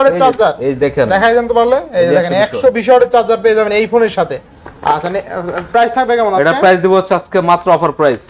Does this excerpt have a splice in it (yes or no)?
no